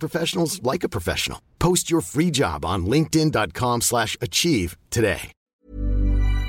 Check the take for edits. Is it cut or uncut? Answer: cut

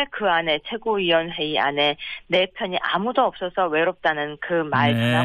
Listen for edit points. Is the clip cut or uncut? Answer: cut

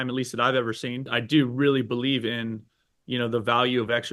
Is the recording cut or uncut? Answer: cut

